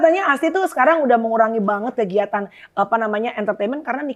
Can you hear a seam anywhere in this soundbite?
no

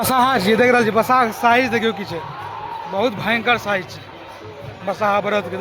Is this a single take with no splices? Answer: yes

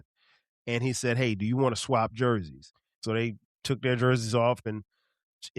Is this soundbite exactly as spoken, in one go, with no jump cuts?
no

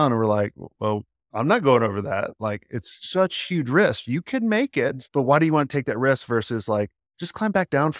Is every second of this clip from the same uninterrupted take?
no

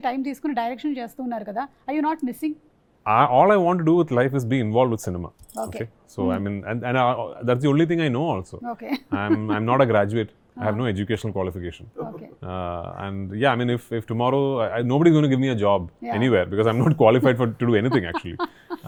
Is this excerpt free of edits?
yes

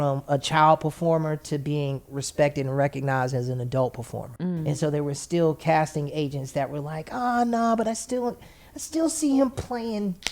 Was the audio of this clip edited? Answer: no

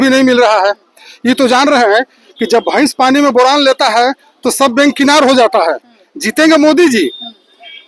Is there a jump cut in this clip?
no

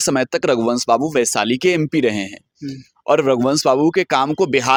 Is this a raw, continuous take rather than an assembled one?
yes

